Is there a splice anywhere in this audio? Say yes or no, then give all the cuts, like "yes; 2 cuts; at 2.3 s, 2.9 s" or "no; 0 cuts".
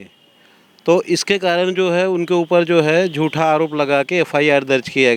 no; 0 cuts